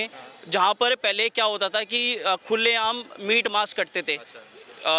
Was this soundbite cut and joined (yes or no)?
no